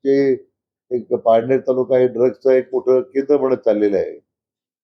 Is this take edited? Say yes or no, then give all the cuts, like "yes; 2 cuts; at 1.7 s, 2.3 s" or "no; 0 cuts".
no; 0 cuts